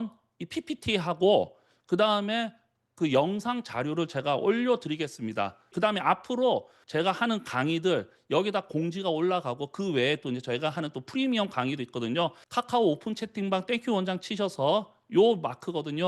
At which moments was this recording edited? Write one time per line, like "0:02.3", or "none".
none